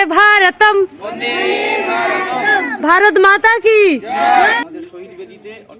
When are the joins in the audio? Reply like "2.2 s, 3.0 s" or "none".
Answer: 4.5 s